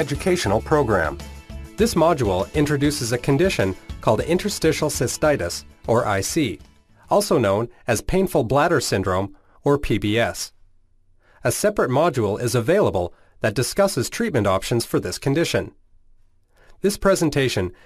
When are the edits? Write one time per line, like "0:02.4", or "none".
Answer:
0:08.1